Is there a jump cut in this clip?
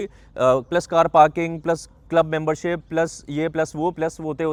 no; 0 cuts

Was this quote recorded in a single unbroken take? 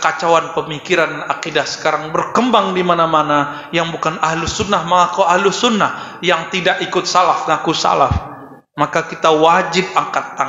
yes; 0 cuts

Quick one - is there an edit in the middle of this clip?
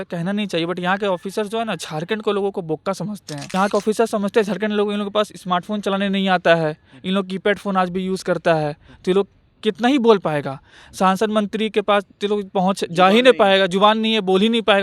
yes; 1 cut; at 3.5 s

